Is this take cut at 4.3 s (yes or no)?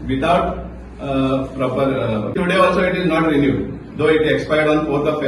no